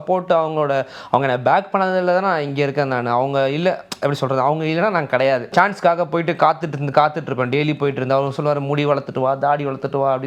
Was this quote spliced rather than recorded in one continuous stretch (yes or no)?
yes